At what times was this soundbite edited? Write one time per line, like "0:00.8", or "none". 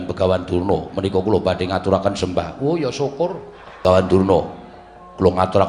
0:03.7